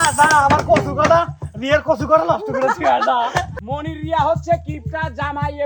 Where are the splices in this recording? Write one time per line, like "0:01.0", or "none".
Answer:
0:03.6